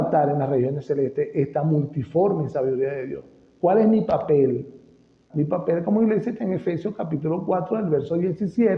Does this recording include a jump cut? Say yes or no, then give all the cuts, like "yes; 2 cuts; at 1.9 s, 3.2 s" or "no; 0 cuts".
yes; 1 cut; at 5.2 s